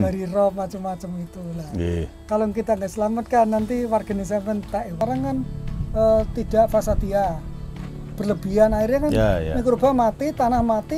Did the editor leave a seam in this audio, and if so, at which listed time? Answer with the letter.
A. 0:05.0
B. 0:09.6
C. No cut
A